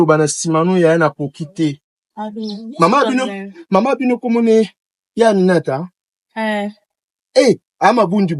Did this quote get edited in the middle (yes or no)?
no